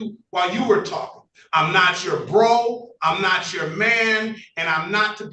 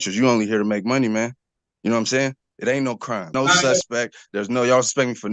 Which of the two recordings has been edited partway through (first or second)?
second